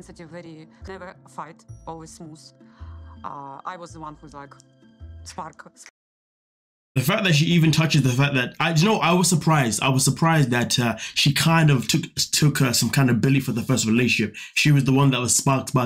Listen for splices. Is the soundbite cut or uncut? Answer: uncut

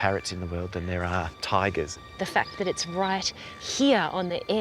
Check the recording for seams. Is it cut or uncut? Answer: cut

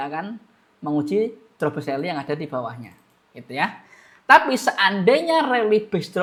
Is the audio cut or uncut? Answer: uncut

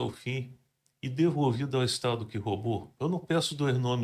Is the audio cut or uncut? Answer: uncut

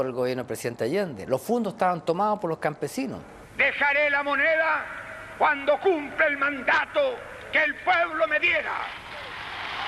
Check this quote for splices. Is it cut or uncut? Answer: cut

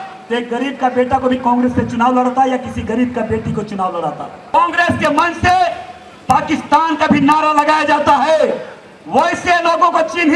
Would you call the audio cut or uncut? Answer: cut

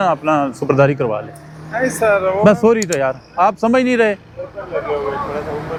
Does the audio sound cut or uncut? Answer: uncut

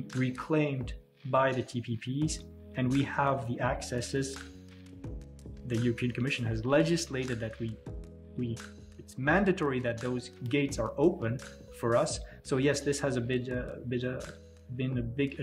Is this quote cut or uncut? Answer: uncut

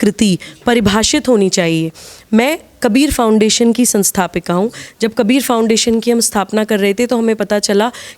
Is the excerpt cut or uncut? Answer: uncut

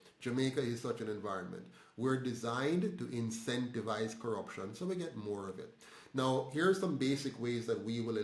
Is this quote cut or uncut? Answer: uncut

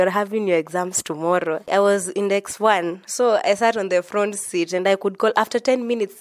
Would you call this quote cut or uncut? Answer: cut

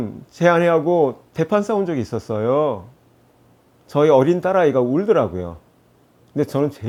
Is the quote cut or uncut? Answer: uncut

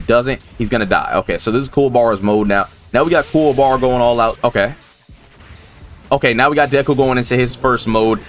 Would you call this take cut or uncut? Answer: cut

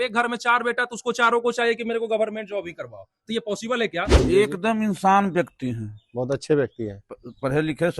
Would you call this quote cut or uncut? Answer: cut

